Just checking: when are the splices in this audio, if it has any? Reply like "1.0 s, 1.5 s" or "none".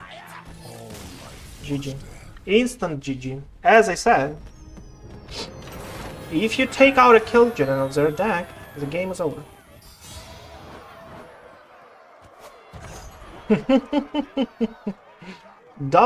none